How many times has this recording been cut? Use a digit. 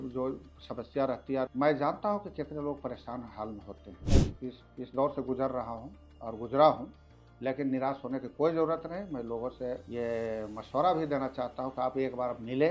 3